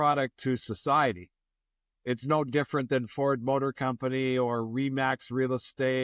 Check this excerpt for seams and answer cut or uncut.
uncut